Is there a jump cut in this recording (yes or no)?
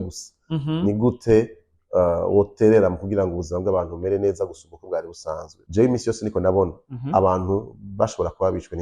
yes